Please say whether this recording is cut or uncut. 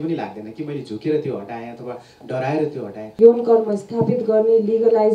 cut